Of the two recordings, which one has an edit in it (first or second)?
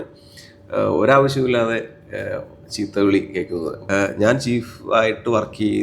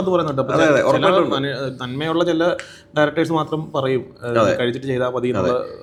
first